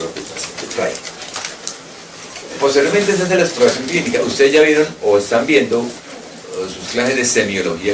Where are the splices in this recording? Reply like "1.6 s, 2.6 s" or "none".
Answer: none